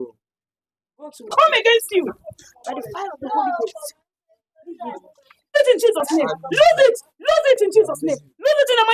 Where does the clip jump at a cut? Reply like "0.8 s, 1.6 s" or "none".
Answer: 1.3 s, 5.5 s